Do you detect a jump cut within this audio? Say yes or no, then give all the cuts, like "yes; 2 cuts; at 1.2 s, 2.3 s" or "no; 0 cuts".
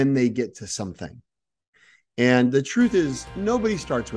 yes; 1 cut; at 3.3 s